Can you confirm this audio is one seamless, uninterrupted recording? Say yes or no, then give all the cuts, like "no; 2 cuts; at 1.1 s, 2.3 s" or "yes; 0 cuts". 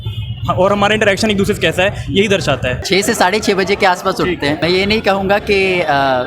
no; 2 cuts; at 2.8 s, 4.6 s